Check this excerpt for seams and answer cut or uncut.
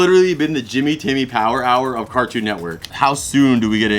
cut